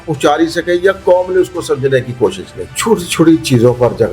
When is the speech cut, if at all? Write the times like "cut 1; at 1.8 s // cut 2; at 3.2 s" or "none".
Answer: cut 1; at 2.6 s